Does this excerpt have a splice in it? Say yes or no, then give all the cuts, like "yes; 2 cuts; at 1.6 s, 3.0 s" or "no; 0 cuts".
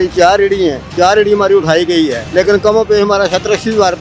yes; 2 cuts; at 0.8 s, 2.2 s